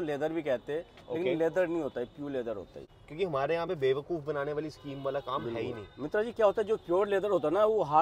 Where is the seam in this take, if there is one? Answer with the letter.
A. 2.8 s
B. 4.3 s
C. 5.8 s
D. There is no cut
A